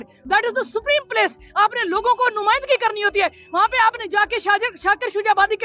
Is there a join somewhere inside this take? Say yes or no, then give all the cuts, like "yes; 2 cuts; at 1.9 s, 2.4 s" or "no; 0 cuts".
no; 0 cuts